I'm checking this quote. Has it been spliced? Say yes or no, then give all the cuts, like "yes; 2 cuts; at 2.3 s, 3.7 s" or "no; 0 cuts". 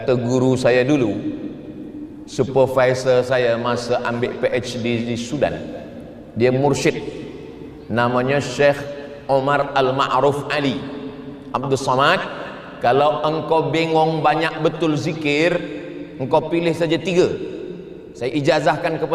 no; 0 cuts